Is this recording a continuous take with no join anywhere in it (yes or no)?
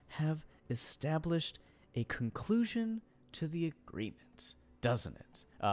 yes